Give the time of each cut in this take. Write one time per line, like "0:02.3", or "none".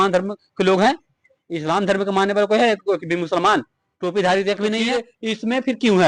0:05.1